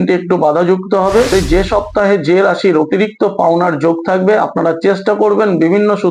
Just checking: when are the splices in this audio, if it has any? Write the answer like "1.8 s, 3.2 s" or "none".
1.3 s